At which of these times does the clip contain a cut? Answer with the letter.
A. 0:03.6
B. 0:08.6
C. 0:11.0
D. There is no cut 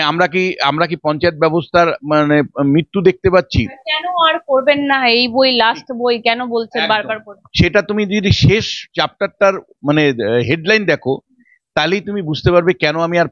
D